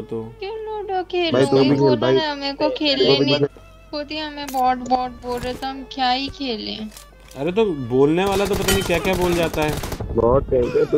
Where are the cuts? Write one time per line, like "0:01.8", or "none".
0:03.5